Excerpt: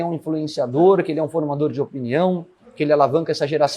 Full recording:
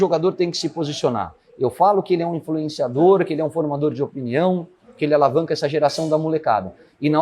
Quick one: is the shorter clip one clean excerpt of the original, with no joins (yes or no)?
yes